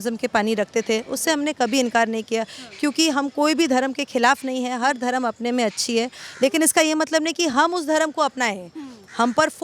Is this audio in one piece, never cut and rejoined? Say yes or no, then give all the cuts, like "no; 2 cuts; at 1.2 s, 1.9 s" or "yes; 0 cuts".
yes; 0 cuts